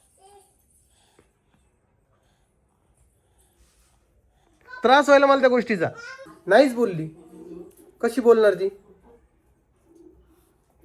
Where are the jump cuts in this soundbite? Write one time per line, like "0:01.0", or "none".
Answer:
0:06.3